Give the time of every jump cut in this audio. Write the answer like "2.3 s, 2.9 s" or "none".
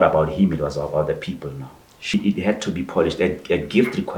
2.1 s